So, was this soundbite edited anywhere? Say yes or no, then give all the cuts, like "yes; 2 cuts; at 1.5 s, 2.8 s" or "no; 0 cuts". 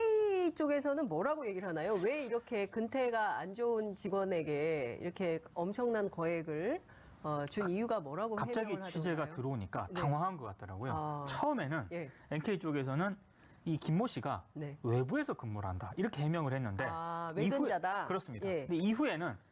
yes; 1 cut; at 11.7 s